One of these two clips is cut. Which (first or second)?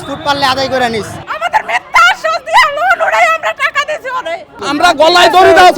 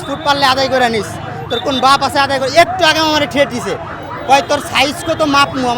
first